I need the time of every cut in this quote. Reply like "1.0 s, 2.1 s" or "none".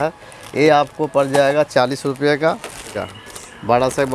3.0 s